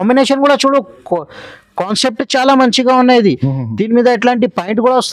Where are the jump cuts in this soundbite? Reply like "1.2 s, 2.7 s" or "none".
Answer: none